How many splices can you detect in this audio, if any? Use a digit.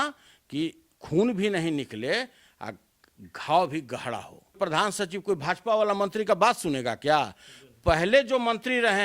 1